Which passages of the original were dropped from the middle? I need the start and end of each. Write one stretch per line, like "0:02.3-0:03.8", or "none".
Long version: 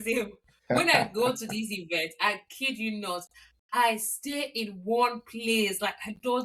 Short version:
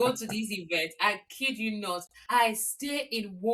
0:03.3-0:03.6